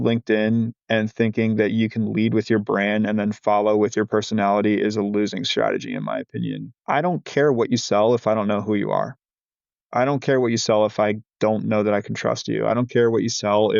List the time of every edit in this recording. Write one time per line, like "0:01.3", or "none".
0:06.7